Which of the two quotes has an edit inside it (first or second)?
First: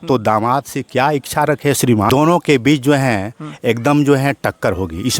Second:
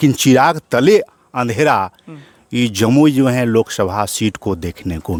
first